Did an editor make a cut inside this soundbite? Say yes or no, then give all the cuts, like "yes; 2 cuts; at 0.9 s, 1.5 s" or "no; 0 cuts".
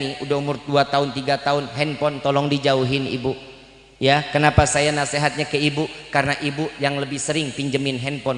no; 0 cuts